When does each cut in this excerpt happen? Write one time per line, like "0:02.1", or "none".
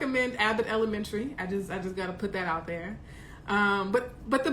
none